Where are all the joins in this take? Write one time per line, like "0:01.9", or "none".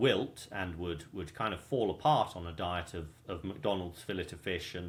none

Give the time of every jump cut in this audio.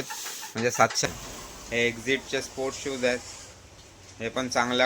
0:01.1

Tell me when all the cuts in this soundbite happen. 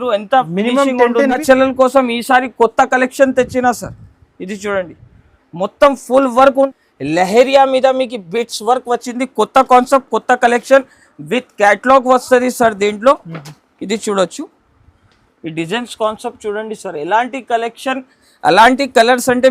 0:01.4
0:06.7

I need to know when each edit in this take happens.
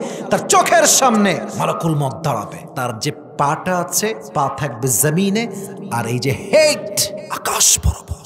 0:01.5
0:02.6
0:04.2
0:07.3

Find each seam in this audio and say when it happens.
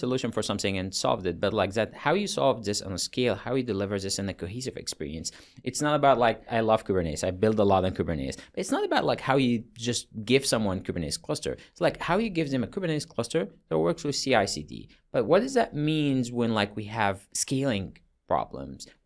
0:06.5
0:17.3

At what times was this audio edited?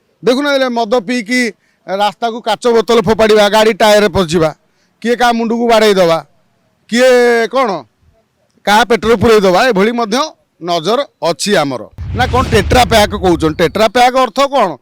0:12.0

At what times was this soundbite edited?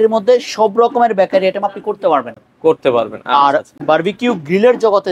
none

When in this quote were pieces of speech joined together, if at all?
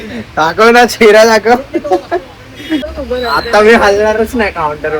0:03.0

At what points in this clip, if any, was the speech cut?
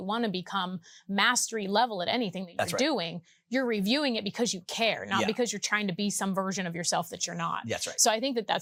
none

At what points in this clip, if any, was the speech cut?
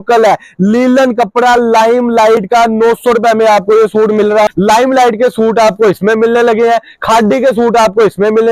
0:04.5

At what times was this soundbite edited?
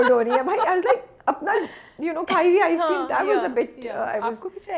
none

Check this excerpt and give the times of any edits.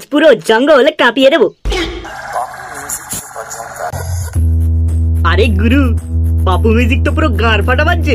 0:02.1
0:03.9

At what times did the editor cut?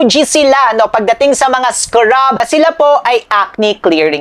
0:02.4

